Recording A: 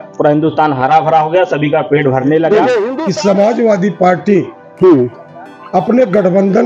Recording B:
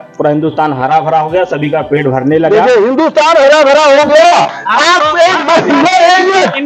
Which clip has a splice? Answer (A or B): A